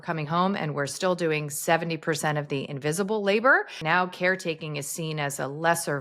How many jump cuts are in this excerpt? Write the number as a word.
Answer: one